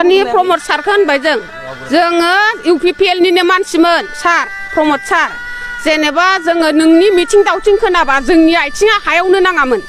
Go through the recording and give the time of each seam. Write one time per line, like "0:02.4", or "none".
none